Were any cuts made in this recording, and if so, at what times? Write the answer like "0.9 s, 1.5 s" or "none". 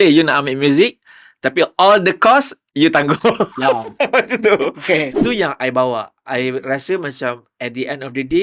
5.1 s